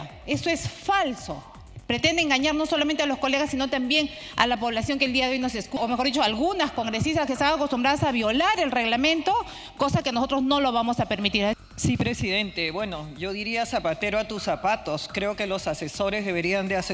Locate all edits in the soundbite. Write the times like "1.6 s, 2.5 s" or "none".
5.8 s, 11.6 s